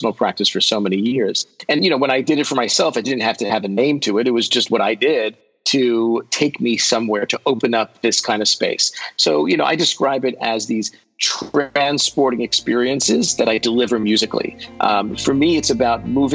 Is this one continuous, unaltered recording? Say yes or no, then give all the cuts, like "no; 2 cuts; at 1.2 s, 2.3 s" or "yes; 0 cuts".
no; 1 cut; at 1.6 s